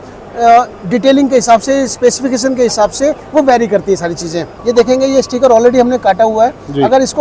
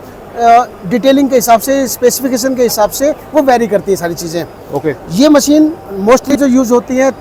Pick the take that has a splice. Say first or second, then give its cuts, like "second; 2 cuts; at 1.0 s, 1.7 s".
first; 1 cut; at 4.5 s